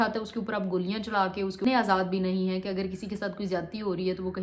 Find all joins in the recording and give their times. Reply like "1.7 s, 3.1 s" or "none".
1.7 s